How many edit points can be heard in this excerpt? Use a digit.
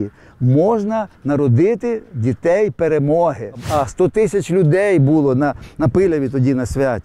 1